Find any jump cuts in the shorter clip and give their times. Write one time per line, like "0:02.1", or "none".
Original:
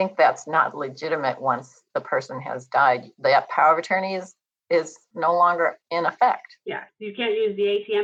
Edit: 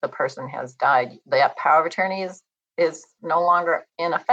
none